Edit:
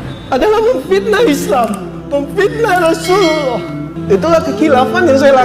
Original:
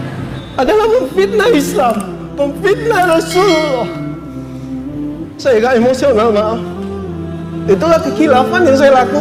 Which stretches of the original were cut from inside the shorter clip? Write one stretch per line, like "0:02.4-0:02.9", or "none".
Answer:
0:04.1-0:07.5